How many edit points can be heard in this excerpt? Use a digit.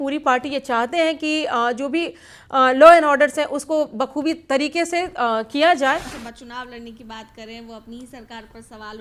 1